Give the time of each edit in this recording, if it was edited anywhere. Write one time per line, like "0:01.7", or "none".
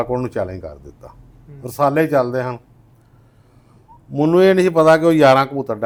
none